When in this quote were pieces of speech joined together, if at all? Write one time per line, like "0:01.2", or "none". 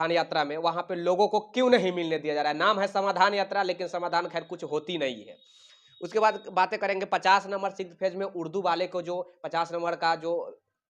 none